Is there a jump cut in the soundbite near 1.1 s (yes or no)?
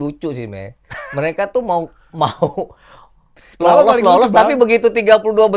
no